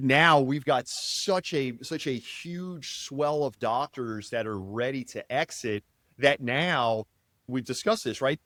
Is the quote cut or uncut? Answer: uncut